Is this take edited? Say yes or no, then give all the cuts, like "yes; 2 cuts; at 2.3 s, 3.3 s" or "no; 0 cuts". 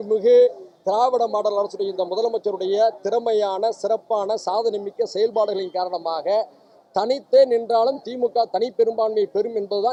no; 0 cuts